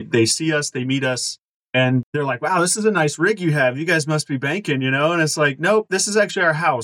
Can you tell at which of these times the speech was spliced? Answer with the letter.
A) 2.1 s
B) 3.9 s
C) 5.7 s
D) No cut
A